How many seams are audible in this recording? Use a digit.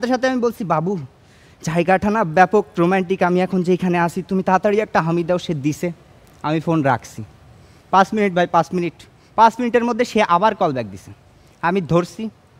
0